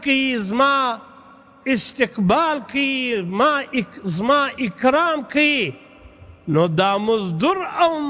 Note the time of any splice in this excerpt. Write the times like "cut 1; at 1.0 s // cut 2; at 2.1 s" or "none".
none